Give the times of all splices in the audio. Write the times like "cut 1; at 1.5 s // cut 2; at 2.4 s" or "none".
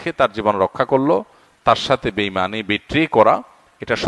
none